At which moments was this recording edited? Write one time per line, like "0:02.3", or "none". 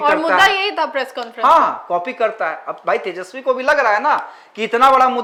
none